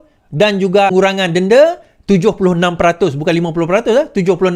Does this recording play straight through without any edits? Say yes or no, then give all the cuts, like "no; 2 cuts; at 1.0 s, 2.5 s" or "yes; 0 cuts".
no; 1 cut; at 0.9 s